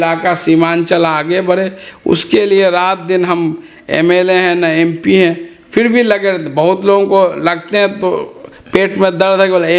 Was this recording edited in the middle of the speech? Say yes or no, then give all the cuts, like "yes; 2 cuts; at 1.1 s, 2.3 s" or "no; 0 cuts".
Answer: no; 0 cuts